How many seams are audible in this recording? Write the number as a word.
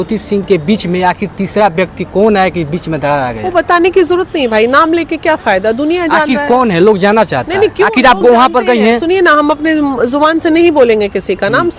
zero